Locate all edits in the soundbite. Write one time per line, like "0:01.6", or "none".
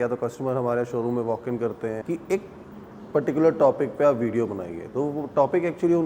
0:02.0